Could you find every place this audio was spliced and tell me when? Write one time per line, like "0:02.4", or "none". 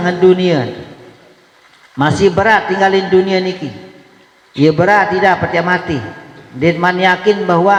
none

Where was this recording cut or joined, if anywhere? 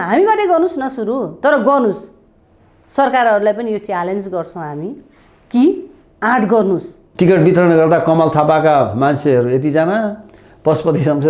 0:07.0

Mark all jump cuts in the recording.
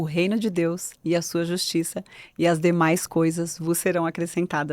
none

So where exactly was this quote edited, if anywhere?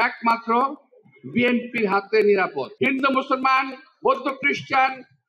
0:02.7

